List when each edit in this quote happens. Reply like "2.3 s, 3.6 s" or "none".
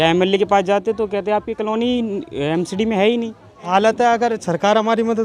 3.6 s